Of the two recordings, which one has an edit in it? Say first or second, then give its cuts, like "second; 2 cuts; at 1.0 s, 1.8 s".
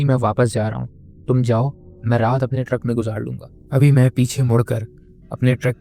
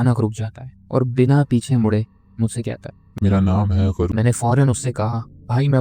second; 1 cut; at 4.1 s